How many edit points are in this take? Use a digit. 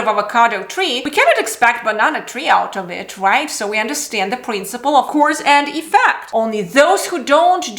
1